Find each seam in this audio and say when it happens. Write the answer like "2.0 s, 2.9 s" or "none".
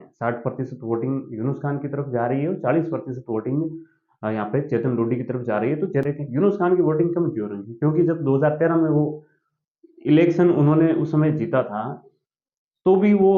6.0 s

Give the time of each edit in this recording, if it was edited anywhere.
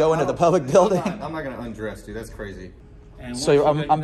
2.7 s

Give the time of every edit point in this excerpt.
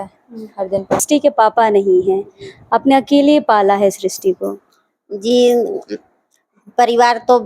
1.0 s

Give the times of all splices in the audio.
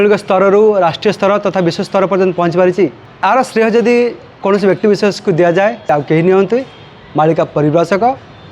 3.0 s, 4.3 s, 5.9 s

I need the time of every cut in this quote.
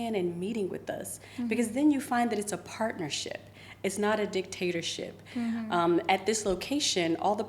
none

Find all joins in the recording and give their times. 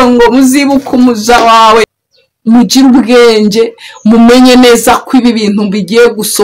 1.9 s

